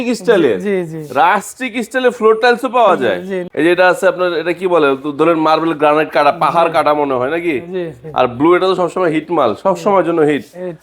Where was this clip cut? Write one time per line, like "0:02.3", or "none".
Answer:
0:03.4